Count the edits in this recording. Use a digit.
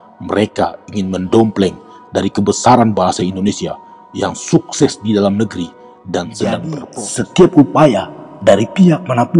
1